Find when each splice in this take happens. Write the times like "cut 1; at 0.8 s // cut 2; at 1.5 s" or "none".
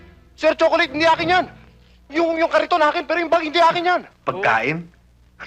cut 1; at 4.2 s

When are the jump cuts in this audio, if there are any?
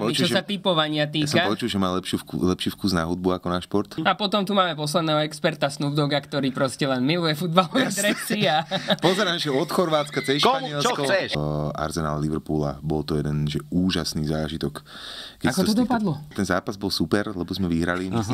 cut 1; at 4.0 s // cut 2; at 11.3 s // cut 3; at 16.3 s

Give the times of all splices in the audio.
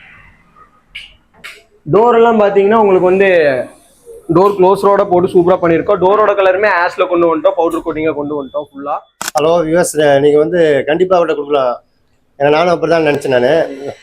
cut 1; at 9.1 s

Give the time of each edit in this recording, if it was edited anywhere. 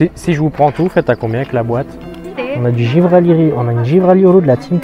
cut 1; at 2.3 s

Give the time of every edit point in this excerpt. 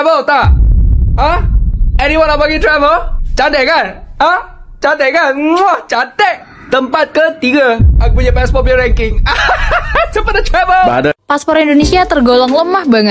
cut 1; at 11.1 s

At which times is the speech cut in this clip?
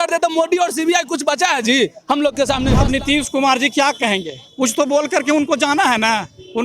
cut 1; at 2.7 s

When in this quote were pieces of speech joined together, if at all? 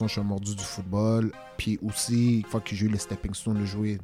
cut 1; at 1.4 s // cut 2; at 2.5 s

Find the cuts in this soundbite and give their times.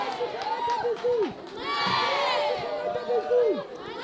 none

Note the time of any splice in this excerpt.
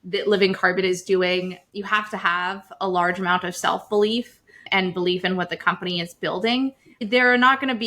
cut 1; at 1.6 s // cut 2; at 7.0 s

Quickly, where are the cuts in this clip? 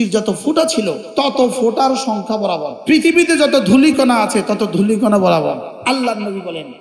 cut 1; at 1.0 s // cut 2; at 2.7 s // cut 3; at 5.7 s

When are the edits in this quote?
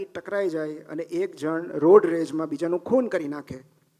none

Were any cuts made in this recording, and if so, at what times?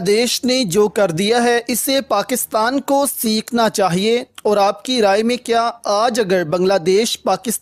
none

